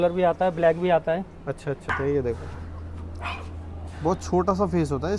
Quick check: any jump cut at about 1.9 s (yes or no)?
yes